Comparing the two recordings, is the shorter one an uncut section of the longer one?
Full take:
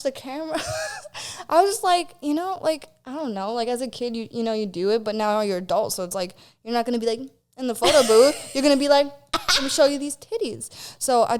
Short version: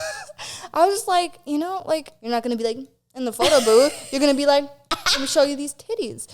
no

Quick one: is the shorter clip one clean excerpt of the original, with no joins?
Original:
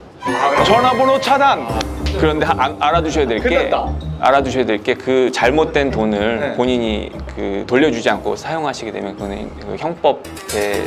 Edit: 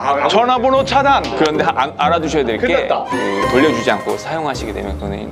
no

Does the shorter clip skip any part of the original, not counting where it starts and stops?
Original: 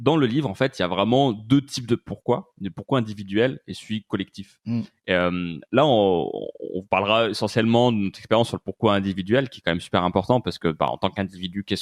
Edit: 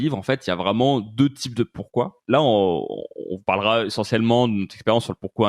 yes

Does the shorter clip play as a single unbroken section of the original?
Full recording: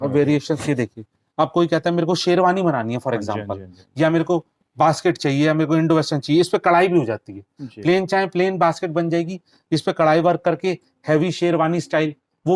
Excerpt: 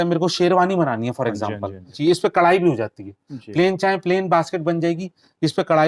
no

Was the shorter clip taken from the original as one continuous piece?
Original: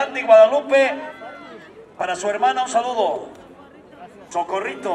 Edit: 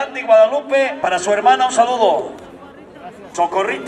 no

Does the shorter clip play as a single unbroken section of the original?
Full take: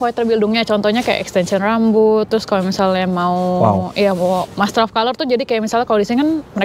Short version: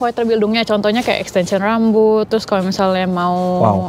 yes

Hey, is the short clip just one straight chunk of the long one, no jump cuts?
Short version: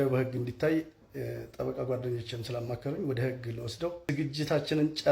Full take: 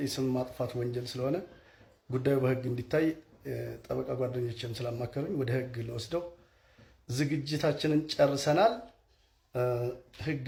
no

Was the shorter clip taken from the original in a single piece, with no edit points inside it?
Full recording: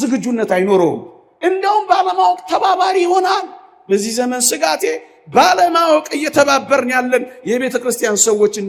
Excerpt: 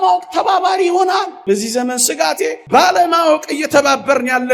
no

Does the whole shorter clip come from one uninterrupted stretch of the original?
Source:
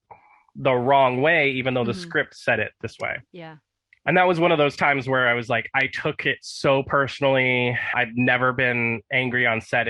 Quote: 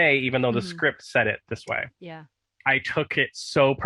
no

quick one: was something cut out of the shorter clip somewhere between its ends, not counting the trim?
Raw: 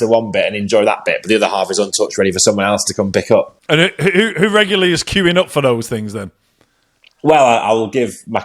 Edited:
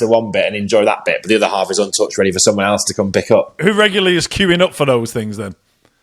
yes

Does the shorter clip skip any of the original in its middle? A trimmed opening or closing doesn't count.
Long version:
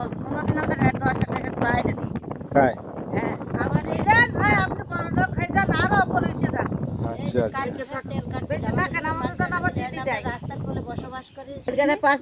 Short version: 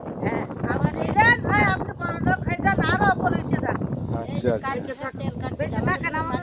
no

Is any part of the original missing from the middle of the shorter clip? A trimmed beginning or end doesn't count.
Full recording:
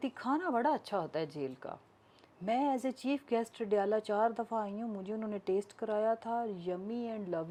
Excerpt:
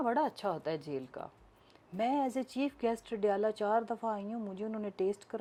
no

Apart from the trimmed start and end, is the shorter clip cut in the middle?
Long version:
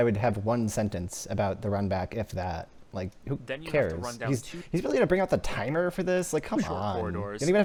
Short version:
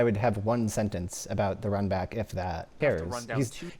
yes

